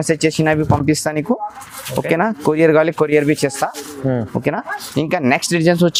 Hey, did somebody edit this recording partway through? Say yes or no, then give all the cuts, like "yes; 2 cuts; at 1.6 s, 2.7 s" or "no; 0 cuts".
no; 0 cuts